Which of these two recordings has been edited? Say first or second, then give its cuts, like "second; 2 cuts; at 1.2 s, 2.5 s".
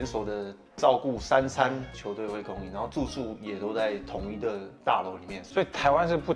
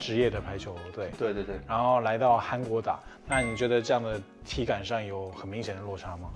first; 1 cut; at 5.3 s